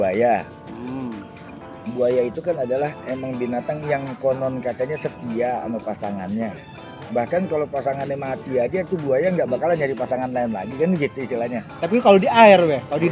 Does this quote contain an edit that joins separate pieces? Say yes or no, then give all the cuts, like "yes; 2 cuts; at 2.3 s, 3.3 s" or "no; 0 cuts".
no; 0 cuts